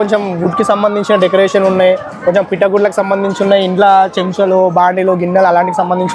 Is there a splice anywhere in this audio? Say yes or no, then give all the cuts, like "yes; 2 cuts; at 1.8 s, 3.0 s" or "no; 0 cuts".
no; 0 cuts